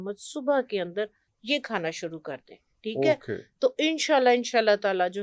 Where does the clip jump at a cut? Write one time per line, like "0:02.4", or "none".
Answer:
none